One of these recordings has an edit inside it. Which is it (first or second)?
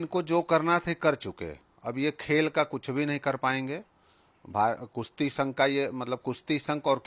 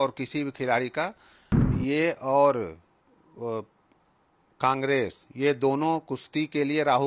second